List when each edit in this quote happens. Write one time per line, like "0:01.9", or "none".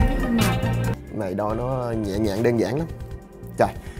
0:01.0